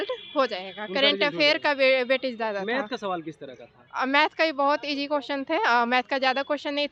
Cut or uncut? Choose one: uncut